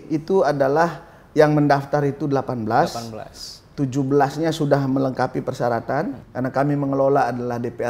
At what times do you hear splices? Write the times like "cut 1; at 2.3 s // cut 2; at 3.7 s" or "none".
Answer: cut 1; at 6.2 s